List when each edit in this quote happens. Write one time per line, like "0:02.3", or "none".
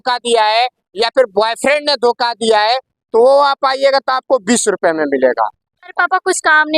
0:05.9